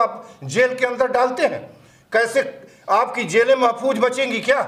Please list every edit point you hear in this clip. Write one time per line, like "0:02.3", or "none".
none

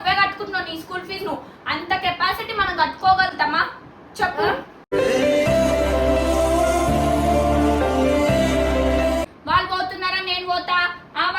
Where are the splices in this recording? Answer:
0:09.3

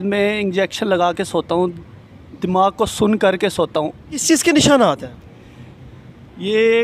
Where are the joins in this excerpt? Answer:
0:04.1

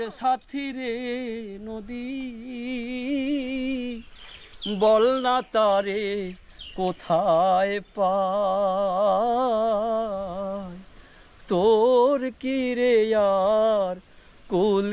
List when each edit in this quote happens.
none

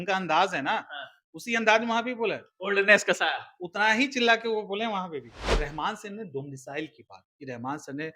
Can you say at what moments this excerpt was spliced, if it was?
0:05.3

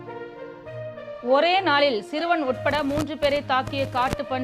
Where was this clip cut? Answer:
0:01.1

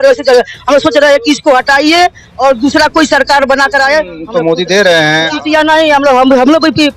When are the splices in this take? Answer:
0:04.2
0:05.4

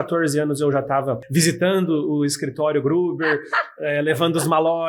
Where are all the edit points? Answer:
0:01.2

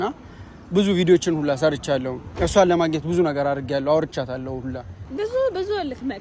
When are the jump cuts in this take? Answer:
0:05.0

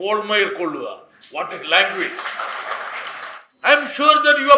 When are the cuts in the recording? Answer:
0:03.4

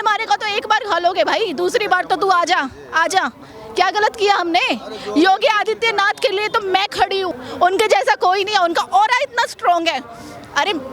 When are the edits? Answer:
0:07.4

